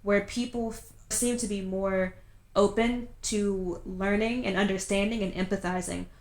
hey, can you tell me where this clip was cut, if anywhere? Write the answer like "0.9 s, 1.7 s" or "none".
1.1 s